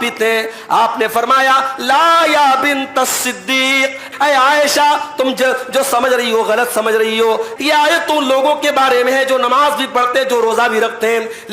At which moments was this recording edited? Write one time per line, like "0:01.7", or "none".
0:04.1
0:07.5